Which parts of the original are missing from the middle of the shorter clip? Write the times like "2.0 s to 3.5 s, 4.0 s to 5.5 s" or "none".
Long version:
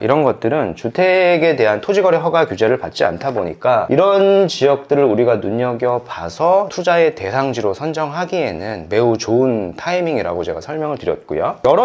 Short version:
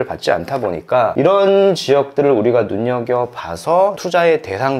none